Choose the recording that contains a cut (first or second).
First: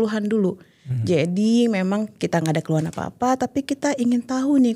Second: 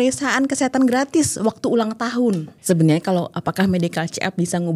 second